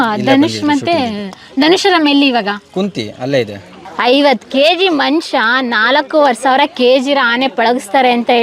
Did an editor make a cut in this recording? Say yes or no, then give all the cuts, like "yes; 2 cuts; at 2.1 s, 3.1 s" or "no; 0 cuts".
yes; 1 cut; at 3.9 s